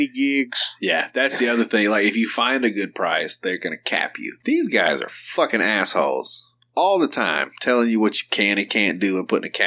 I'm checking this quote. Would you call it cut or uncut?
cut